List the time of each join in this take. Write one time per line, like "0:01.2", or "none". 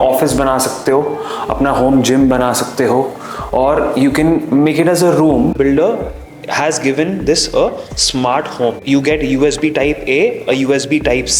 0:05.5
0:08.8